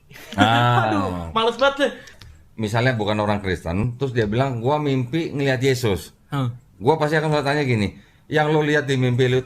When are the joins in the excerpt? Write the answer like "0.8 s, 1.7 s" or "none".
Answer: 2.2 s, 3.9 s